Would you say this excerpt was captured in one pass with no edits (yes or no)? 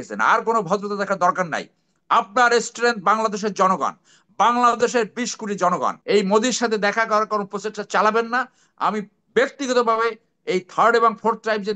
no